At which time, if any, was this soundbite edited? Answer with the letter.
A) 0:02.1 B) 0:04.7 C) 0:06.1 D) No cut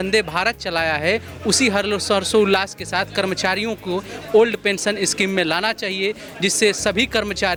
D